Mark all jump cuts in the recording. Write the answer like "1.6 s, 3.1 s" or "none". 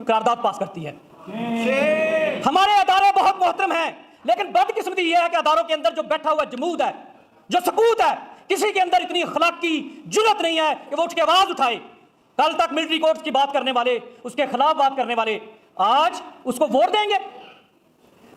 none